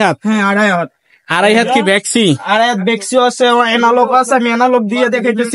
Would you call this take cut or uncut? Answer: uncut